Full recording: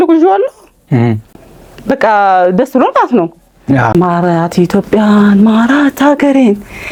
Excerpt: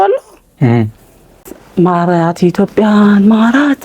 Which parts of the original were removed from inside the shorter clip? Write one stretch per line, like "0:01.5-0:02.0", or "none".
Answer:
0:02.0-0:03.8